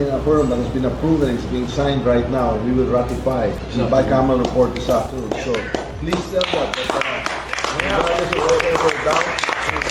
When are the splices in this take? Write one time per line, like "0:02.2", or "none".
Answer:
0:03.6